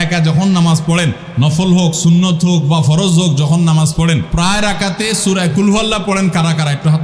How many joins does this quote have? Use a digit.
2